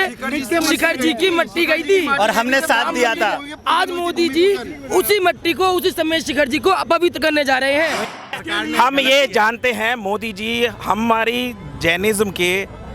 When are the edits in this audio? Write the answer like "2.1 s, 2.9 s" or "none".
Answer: 8.1 s